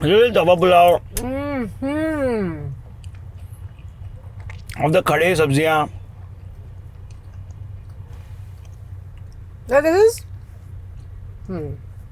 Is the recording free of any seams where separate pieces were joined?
yes; 0 cuts

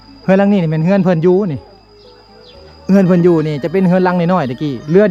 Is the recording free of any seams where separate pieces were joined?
yes; 0 cuts

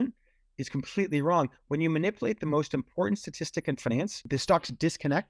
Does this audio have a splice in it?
yes; 1 cut; at 4.2 s

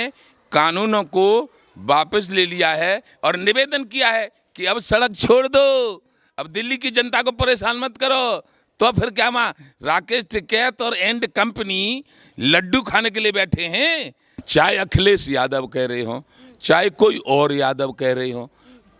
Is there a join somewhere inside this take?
yes; 1 cut; at 14.4 s

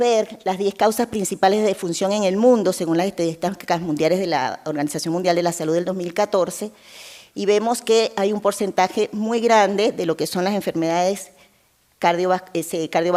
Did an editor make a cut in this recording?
no; 0 cuts

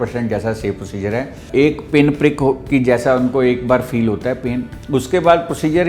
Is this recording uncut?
no; 2 cuts; at 1.4 s, 4.7 s

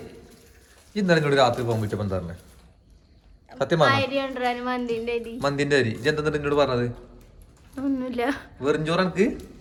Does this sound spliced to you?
no; 0 cuts

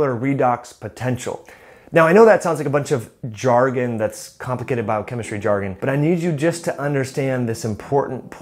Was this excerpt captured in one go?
no; 1 cut; at 5.7 s

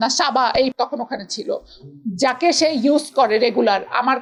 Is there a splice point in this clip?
no; 0 cuts

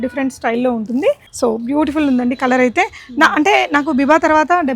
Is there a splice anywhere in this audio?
yes; 1 cut; at 1.3 s

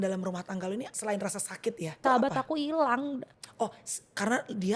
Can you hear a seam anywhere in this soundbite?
yes; 3 cuts; at 0.9 s, 2.0 s, 3.4 s

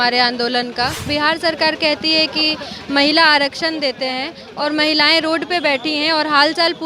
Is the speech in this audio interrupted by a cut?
yes; 1 cut; at 1.1 s

